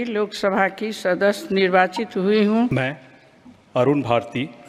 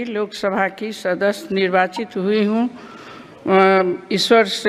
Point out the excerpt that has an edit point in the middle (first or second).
first